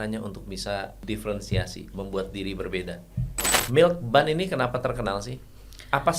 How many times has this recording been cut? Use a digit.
2